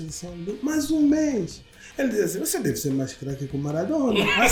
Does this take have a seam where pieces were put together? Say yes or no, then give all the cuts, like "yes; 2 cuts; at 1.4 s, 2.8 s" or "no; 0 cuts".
no; 0 cuts